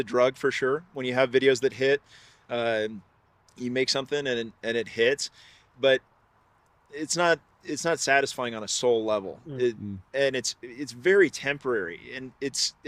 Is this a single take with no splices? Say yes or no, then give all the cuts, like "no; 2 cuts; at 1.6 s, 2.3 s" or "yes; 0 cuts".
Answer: yes; 0 cuts